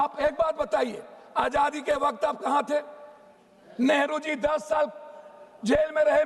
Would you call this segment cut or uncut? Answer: uncut